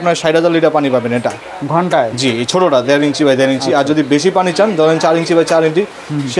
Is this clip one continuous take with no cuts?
yes; 0 cuts

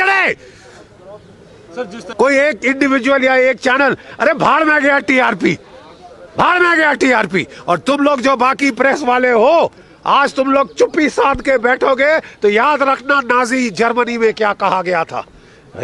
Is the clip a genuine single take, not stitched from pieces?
no; 1 cut; at 2.0 s

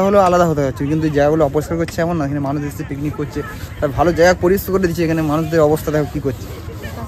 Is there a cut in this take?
no; 0 cuts

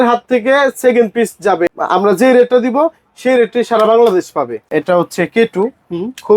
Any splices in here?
yes; 2 cuts; at 1.7 s, 4.7 s

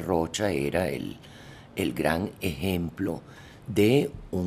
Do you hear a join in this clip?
no; 0 cuts

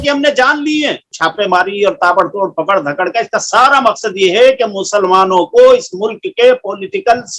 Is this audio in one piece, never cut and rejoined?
no; 1 cut; at 1.1 s

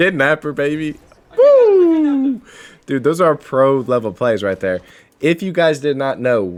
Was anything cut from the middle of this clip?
no; 0 cuts

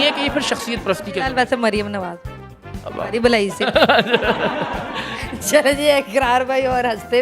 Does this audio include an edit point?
no; 0 cuts

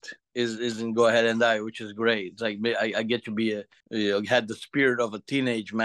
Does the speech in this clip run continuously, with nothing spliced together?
yes; 0 cuts

